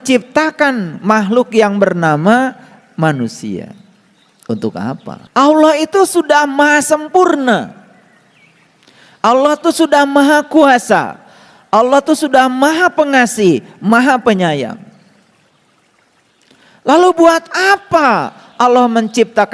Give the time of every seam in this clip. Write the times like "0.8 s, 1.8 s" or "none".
5.2 s